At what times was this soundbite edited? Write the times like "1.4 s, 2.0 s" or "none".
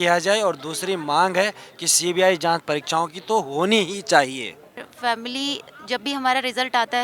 4.8 s